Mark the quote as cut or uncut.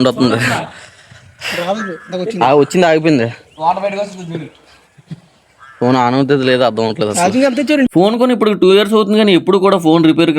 cut